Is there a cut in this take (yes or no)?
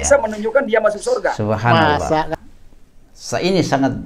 yes